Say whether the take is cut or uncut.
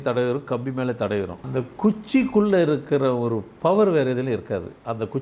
cut